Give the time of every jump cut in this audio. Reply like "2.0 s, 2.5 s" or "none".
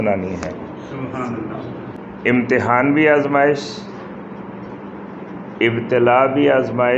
2.0 s